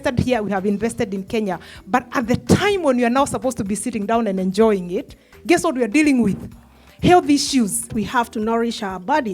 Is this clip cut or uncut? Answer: cut